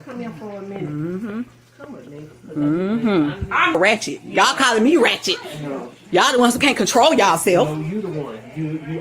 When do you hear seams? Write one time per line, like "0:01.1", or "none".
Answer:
0:03.7